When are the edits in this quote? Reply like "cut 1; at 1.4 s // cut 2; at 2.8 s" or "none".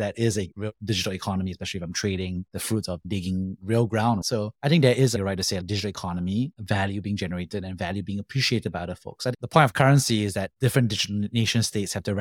cut 1; at 9.3 s